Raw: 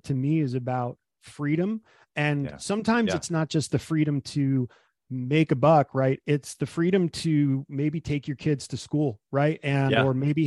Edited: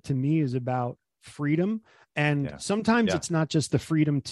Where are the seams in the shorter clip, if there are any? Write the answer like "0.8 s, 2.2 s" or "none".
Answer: none